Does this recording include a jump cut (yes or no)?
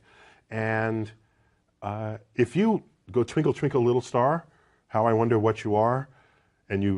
yes